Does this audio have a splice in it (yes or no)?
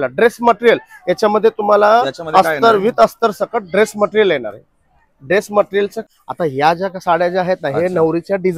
yes